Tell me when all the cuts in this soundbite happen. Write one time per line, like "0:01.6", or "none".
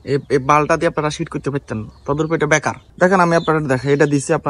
0:02.8